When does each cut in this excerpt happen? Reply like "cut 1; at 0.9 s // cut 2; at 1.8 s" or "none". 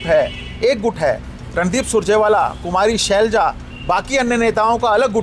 none